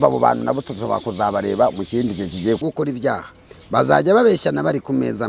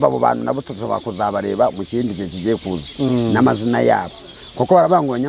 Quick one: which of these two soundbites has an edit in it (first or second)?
first